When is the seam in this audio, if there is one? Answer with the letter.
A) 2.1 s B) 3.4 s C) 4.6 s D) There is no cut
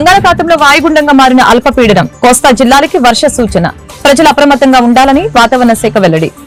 D